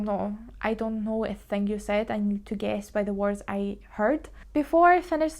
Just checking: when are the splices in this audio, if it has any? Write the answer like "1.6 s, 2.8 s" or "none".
none